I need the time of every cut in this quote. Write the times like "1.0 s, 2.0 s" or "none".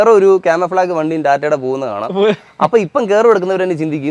none